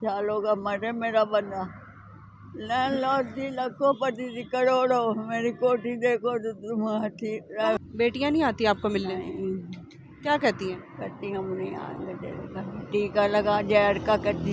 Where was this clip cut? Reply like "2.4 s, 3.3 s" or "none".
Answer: 7.8 s